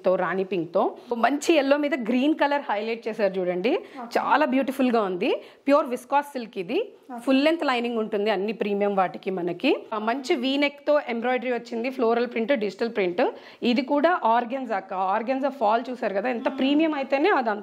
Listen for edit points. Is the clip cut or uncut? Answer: cut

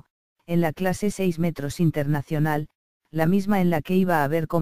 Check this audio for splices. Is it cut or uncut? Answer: uncut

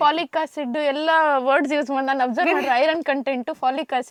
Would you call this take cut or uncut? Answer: uncut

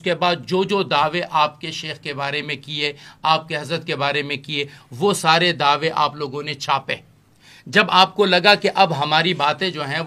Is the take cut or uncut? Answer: uncut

